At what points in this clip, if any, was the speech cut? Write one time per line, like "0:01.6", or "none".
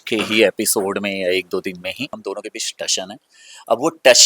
0:02.2